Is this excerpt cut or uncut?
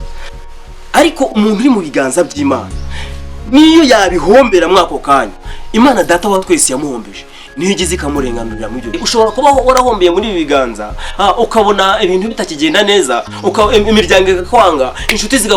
cut